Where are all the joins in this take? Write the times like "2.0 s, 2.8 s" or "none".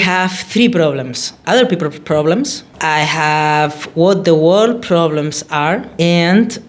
1.4 s